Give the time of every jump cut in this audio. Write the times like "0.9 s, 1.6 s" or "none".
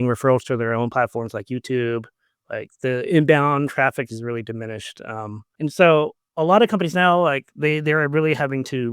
5.4 s, 6.2 s